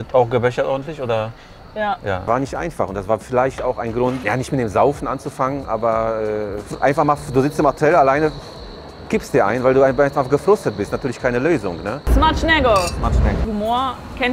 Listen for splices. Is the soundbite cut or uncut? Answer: cut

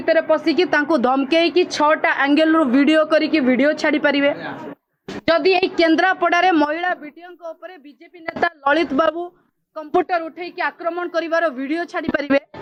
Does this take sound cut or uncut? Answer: uncut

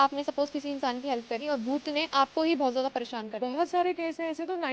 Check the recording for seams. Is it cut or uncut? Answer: uncut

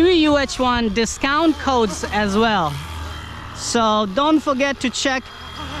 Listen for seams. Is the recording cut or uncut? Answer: uncut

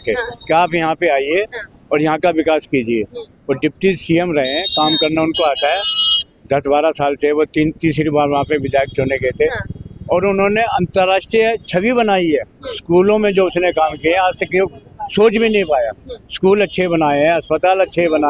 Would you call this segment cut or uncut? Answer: uncut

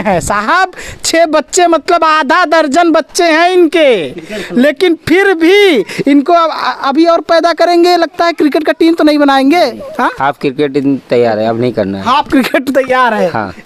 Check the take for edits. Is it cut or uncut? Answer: uncut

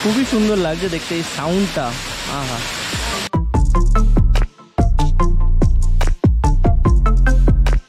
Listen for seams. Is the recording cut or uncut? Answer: uncut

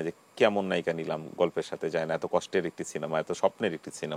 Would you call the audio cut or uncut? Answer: uncut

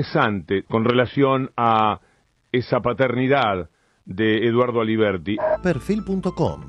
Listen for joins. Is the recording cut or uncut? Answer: uncut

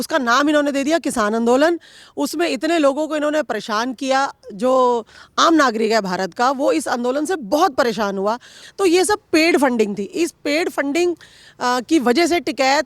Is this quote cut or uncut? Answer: cut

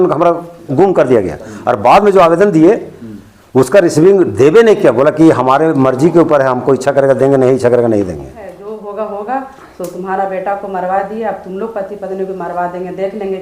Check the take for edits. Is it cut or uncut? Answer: cut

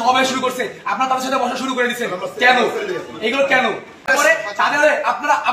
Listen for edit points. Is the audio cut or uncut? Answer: cut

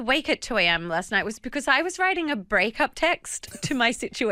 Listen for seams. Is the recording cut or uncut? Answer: uncut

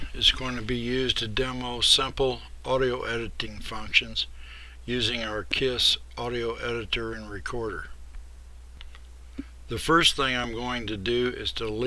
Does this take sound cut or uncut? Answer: cut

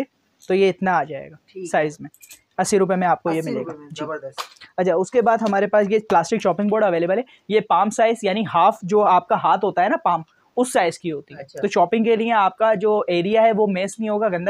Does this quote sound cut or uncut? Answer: uncut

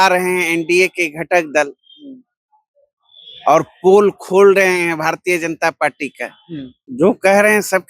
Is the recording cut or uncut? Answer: cut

